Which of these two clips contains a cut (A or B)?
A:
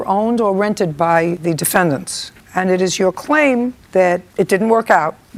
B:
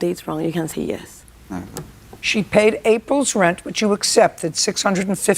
B